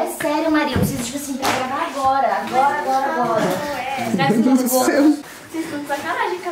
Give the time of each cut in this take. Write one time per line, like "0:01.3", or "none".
0:05.4